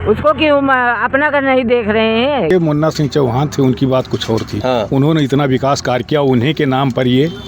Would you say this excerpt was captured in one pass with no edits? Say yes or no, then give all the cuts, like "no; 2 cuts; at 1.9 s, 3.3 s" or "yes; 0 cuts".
no; 1 cut; at 2.5 s